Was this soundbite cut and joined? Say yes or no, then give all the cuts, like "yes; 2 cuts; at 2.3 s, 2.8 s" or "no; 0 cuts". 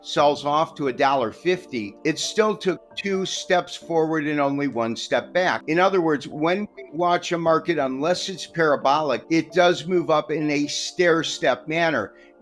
yes; 3 cuts; at 1.9 s, 5.6 s, 9.2 s